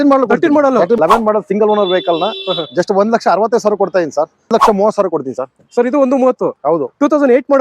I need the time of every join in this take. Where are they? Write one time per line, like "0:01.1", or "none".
0:01.0
0:04.5